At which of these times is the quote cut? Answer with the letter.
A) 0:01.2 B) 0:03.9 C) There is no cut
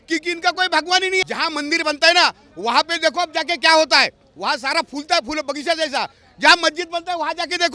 A